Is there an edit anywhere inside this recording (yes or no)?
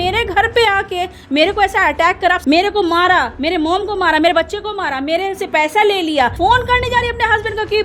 yes